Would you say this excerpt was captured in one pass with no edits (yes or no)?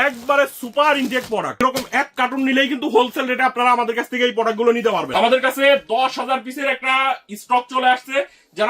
no